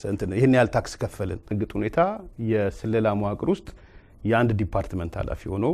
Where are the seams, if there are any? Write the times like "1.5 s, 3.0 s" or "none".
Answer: 1.6 s